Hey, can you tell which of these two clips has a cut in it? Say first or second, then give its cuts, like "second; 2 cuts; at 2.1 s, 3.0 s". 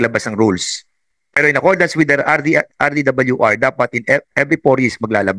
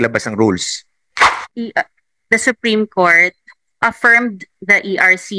second; 1 cut; at 1.3 s